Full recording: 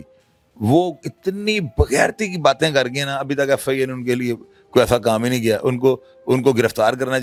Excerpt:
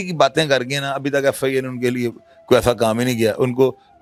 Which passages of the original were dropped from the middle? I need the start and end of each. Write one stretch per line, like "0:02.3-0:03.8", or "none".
none